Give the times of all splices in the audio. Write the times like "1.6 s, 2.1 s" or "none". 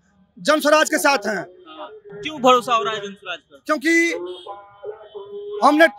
none